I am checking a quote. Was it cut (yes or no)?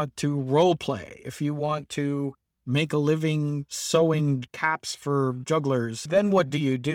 yes